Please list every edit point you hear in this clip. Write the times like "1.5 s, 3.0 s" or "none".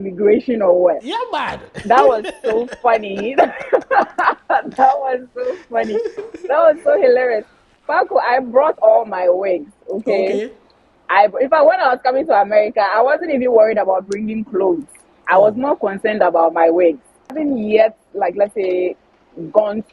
17.4 s